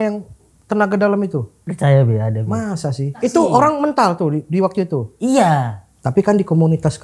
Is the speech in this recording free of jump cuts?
no; 2 cuts; at 1.6 s, 3.2 s

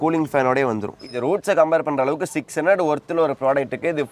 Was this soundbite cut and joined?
yes; 1 cut; at 1.1 s

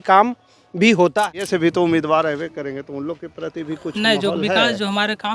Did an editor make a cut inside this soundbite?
yes; 1 cut; at 1.5 s

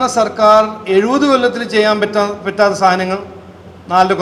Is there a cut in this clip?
no; 0 cuts

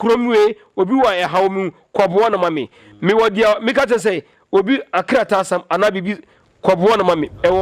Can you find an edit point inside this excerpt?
no; 0 cuts

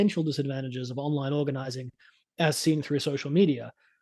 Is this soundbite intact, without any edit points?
yes; 0 cuts

